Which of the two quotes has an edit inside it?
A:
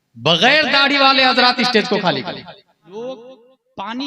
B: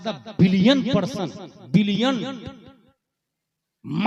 A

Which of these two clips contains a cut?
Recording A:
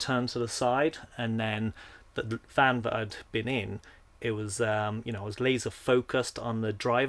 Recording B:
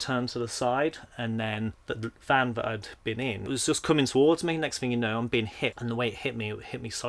B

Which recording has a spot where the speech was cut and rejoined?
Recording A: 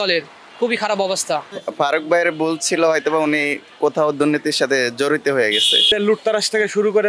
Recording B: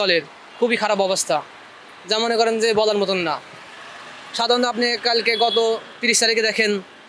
A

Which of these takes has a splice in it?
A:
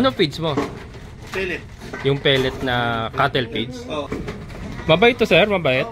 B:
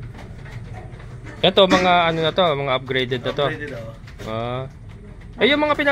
A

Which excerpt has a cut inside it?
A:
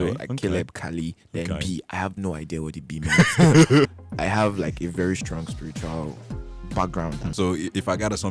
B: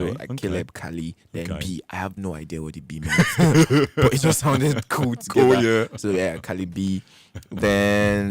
A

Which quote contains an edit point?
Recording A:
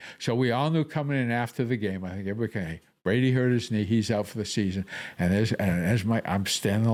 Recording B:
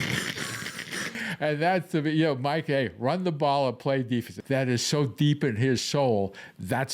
B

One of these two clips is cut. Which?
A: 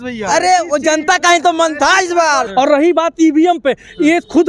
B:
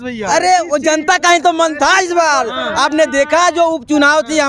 A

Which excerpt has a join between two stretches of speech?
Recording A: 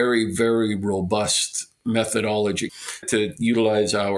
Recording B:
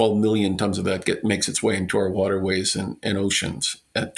A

